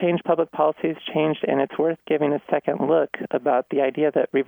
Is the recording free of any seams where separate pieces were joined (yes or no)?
yes